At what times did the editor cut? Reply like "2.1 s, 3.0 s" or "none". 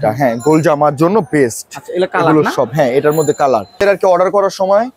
3.8 s

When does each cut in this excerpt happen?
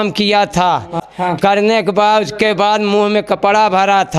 1.0 s

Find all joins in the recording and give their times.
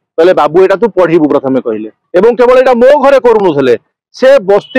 2.0 s

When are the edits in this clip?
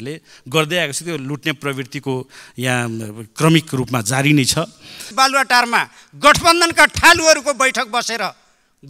5.1 s

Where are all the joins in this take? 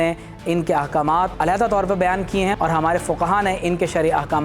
1.3 s

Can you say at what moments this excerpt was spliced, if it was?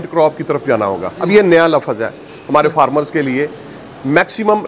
1.1 s

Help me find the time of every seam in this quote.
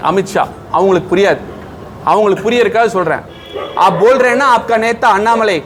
none

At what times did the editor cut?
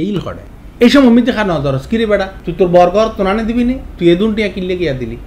2.4 s

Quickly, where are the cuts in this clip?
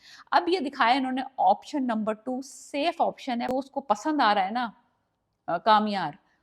3.5 s

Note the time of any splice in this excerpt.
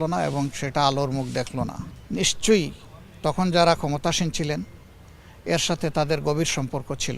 1.9 s

